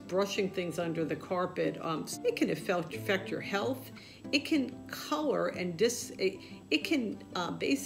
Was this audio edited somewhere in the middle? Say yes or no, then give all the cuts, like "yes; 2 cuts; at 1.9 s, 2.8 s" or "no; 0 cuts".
yes; 1 cut; at 2.1 s